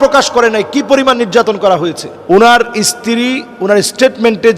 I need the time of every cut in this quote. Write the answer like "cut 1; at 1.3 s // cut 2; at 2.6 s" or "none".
cut 1; at 2.1 s